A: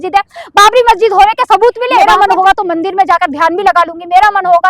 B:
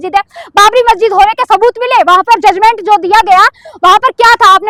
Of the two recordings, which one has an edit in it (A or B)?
A